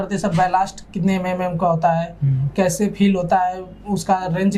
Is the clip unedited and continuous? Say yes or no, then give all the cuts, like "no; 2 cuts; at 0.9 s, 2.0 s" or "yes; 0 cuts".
yes; 0 cuts